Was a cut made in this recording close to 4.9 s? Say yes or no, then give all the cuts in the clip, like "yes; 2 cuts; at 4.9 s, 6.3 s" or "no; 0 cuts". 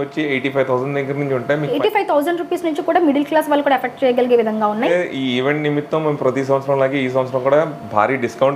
yes; 2 cuts; at 1.8 s, 4.9 s